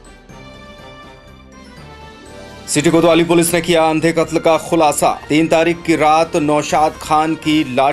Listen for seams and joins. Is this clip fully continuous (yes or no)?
yes